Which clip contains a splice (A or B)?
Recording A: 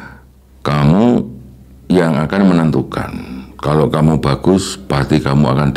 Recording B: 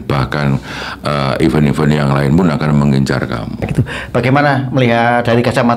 B